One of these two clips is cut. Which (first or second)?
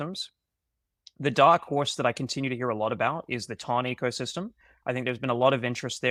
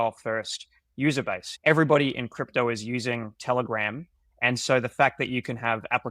second